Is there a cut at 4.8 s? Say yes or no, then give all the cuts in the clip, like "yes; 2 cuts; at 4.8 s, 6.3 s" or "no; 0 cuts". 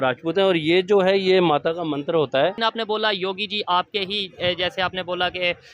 no; 1 cut; at 2.6 s